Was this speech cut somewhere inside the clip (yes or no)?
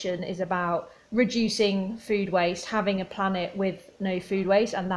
no